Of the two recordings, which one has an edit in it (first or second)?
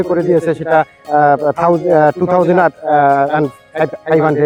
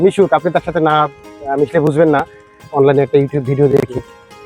second